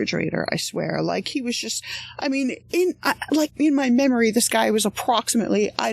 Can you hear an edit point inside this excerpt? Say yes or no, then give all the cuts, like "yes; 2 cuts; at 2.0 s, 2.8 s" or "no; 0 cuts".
yes; 1 cut; at 3.5 s